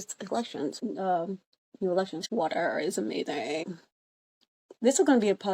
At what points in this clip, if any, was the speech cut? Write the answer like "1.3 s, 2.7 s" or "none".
0.8 s, 2.2 s, 3.8 s